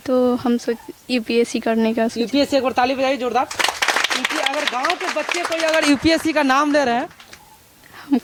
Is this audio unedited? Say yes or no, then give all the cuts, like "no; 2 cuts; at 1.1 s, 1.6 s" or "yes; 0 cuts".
yes; 0 cuts